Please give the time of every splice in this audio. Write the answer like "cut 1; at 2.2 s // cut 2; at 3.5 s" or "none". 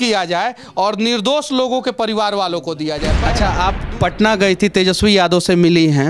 cut 1; at 3.2 s